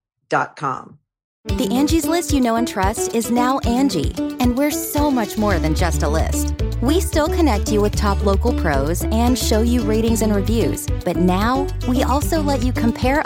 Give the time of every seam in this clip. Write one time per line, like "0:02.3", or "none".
0:01.4